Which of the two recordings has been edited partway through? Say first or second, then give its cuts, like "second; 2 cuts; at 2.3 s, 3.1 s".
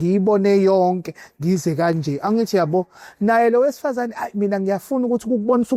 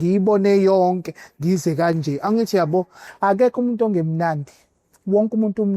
second; 1 cut; at 3.0 s